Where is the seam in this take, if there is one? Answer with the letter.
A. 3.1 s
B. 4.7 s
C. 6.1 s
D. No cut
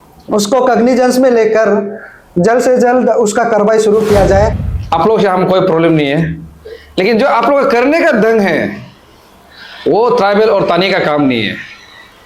B